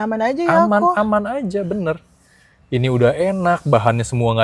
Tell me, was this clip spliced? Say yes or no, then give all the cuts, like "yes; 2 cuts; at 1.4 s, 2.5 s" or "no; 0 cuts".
no; 0 cuts